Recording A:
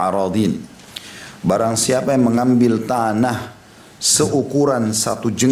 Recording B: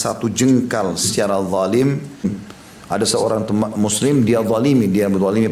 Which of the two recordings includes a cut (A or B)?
B